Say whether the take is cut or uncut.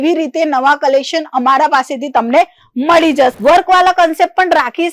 cut